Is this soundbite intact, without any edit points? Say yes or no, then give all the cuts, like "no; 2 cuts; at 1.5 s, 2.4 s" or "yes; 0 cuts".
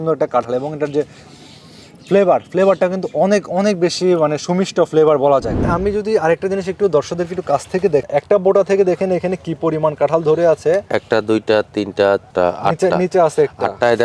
no; 3 cuts; at 5.6 s, 8.0 s, 12.3 s